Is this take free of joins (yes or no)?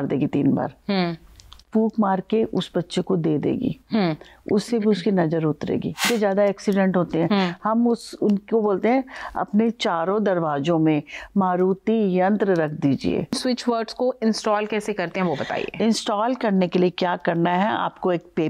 no